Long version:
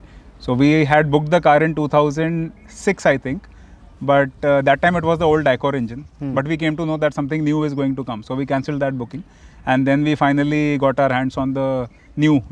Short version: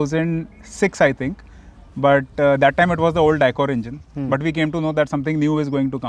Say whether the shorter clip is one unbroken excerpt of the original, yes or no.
yes